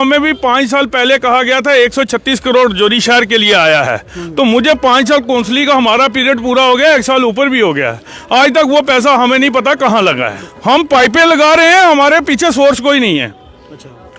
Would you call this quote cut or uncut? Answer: cut